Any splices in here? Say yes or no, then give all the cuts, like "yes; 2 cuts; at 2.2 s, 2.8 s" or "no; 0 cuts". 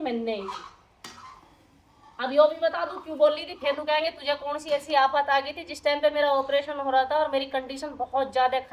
no; 0 cuts